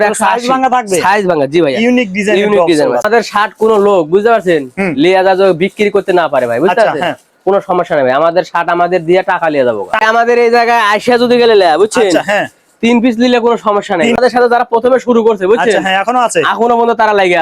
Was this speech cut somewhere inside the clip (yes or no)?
yes